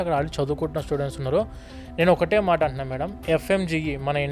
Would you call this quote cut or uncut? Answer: uncut